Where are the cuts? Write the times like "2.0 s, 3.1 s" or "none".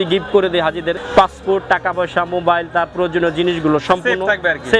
1.0 s